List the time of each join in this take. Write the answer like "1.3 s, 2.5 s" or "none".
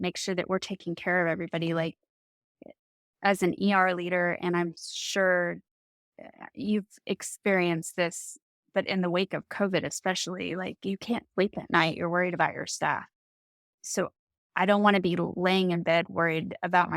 13.7 s